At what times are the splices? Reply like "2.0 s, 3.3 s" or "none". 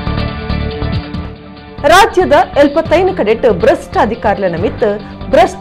1.1 s